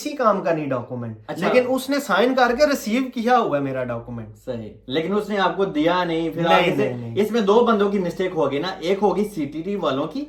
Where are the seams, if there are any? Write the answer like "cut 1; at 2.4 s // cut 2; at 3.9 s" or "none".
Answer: none